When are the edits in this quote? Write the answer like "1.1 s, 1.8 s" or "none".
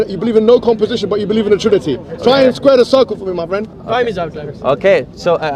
none